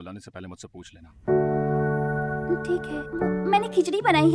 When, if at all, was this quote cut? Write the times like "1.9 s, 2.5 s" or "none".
1.0 s, 3.4 s